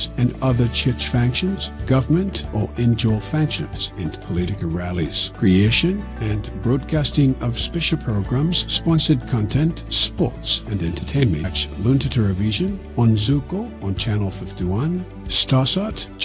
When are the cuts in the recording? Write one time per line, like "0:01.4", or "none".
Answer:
0:11.6